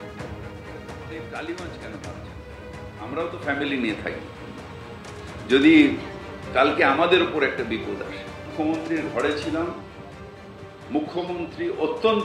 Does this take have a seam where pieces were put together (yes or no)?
yes